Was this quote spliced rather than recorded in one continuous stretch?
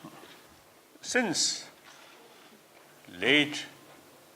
yes; 1 cut; at 2.4 s

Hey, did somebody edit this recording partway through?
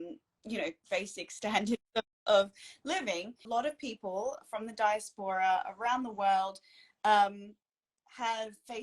yes; 1 cut; at 3.5 s

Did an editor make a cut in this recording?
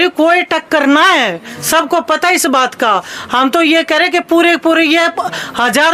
no; 0 cuts

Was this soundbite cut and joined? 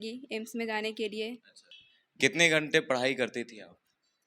no; 0 cuts

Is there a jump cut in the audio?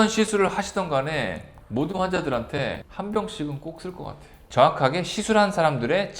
yes; 1 cut; at 4.3 s

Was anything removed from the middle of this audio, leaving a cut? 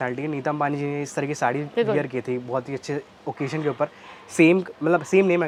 no; 0 cuts

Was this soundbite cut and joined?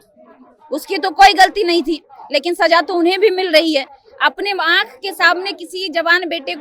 no; 0 cuts

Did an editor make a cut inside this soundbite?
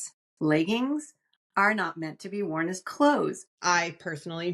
yes; 1 cut; at 3.6 s

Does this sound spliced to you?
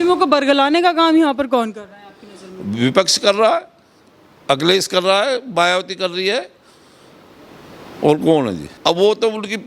yes; 1 cut; at 8.7 s

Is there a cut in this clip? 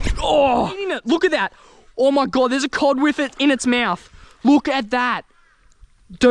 yes; 1 cut; at 0.9 s

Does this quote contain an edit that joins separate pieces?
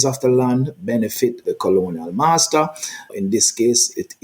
yes; 1 cut; at 3.1 s

